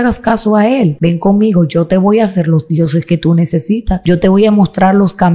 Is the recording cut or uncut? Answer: cut